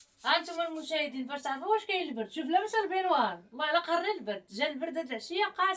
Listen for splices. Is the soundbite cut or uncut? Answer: uncut